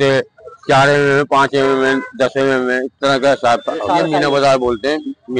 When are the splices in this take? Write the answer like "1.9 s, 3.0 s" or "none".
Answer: 4.2 s